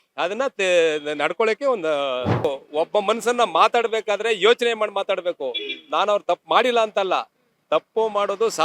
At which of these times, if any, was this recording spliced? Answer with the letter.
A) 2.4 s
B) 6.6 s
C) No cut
A